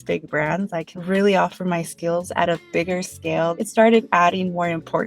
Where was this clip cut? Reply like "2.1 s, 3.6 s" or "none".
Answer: 0.9 s, 3.6 s